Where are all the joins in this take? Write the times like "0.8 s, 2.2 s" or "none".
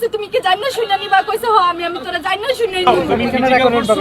2.9 s